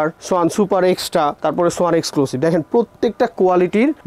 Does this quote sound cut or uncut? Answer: uncut